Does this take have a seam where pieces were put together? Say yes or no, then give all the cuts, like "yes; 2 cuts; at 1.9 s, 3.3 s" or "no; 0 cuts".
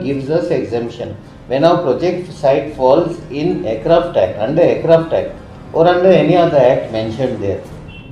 no; 0 cuts